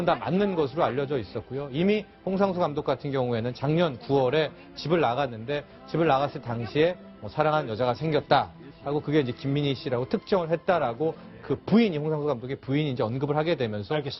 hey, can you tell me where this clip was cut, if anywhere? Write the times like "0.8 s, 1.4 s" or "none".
none